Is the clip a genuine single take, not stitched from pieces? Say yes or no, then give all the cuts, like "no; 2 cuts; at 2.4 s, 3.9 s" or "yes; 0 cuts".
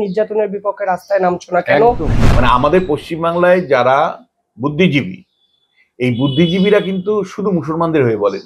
no; 1 cut; at 2.1 s